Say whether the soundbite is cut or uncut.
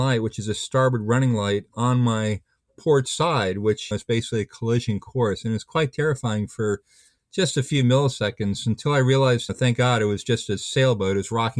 cut